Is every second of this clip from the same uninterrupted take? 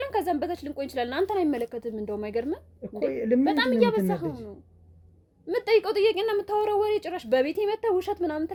yes; 0 cuts

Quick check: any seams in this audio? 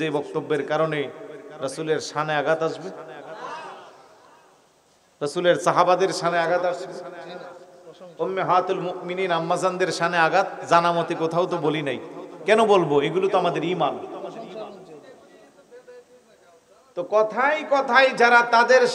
no; 0 cuts

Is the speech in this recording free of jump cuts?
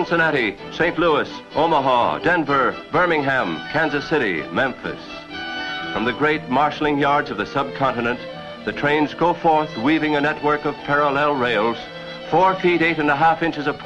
yes; 0 cuts

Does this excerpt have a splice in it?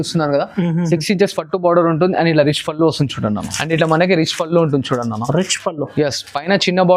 yes; 1 cut; at 3.5 s

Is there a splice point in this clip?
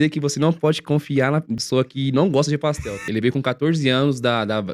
yes; 2 cuts; at 1.6 s, 3.0 s

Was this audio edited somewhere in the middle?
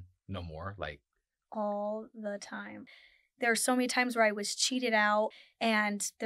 yes; 2 cuts; at 2.8 s, 5.4 s

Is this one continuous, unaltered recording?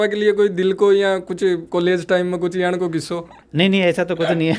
yes; 0 cuts

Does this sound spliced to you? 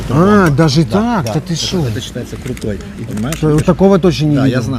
yes; 1 cut; at 3.1 s

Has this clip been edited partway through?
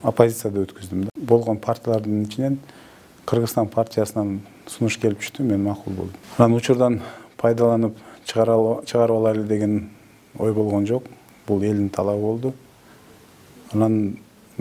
yes; 2 cuts; at 1.2 s, 6.2 s

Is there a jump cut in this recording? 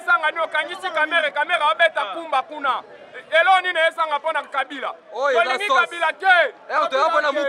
no; 0 cuts

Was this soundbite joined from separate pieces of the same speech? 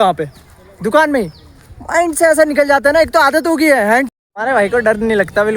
yes; 1 cut; at 4.1 s

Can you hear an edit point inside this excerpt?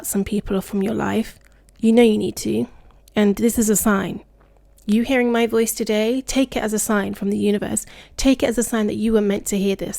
no; 0 cuts

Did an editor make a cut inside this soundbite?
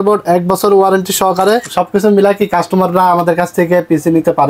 yes; 1 cut; at 1.6 s

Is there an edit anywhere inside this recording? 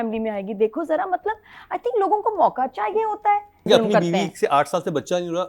yes; 1 cut; at 3.7 s

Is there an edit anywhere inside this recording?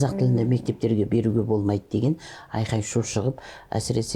no; 0 cuts

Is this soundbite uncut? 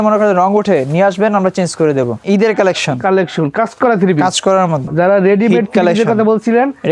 no; 2 cuts; at 2.2 s, 4.8 s

